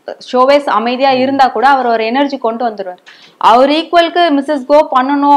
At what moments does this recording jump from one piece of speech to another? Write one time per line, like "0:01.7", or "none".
none

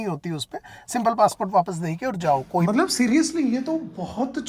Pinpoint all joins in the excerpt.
0:02.6

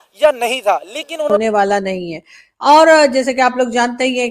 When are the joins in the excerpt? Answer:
0:01.4

